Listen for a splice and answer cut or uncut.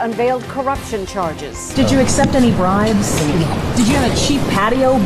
uncut